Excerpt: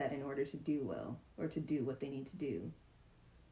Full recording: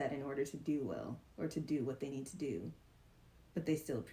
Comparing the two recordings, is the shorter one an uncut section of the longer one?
yes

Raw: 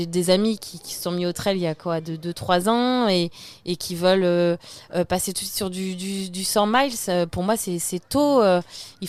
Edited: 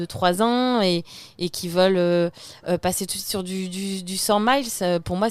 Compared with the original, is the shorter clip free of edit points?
yes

